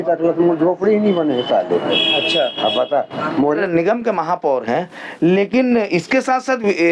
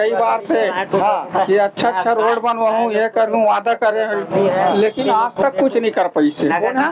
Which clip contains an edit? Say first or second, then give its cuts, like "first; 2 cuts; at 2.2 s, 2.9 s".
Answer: first; 1 cut; at 3.6 s